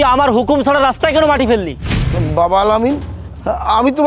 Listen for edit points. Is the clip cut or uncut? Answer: uncut